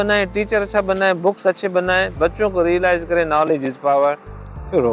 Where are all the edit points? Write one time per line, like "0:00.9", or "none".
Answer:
none